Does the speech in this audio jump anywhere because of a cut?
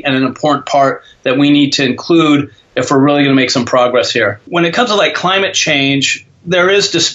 yes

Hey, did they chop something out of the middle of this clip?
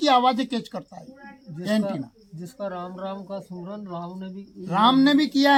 no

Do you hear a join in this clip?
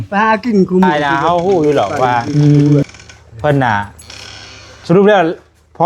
yes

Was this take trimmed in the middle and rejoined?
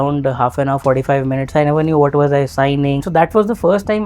yes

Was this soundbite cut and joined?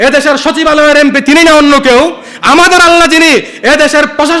no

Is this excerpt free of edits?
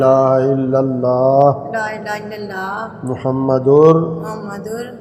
yes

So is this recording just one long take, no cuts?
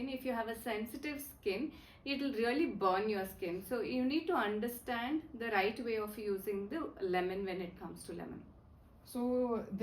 yes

